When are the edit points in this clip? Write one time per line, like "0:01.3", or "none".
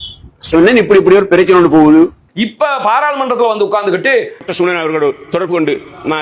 0:02.2
0:04.5